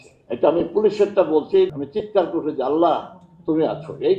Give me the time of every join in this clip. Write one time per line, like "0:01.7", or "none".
0:01.7